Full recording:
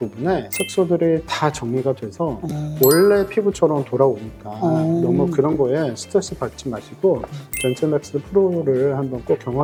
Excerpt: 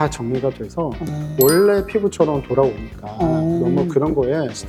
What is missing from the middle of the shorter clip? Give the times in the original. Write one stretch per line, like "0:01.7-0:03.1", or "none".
none